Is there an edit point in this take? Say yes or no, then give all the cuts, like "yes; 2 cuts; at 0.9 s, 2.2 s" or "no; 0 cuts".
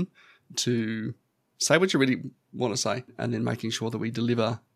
yes; 1 cut; at 3.1 s